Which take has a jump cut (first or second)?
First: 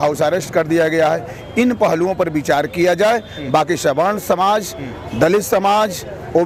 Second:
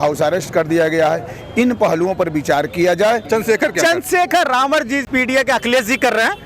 second